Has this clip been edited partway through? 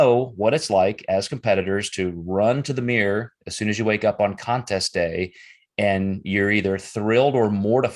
no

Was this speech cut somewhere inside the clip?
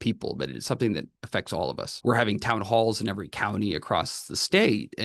yes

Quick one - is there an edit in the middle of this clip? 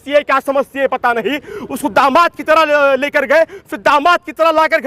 no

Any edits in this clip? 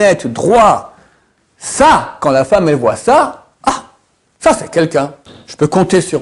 no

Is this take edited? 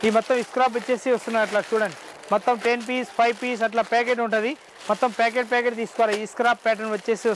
no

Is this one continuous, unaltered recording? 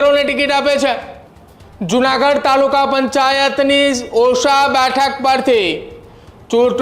yes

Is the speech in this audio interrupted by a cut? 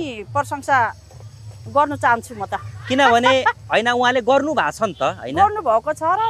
no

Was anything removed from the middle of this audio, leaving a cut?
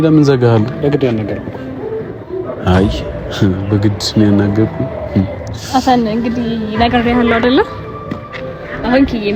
no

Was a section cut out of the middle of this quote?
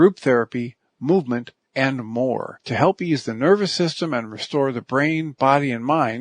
yes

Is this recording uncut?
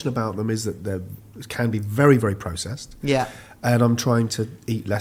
yes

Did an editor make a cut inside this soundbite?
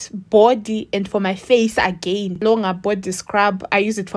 yes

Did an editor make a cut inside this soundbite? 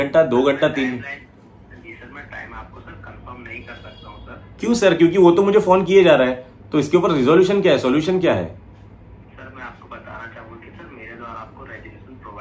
no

